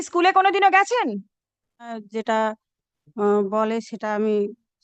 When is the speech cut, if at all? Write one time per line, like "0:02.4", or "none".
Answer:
0:02.0